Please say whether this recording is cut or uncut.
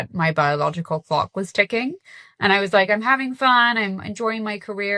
uncut